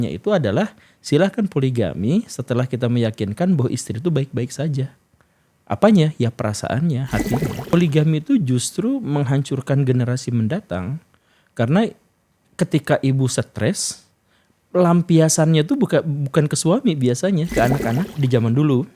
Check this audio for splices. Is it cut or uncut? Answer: cut